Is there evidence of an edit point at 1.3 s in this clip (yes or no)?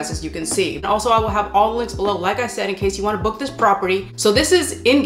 no